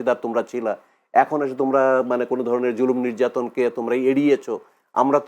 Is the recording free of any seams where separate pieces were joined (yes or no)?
yes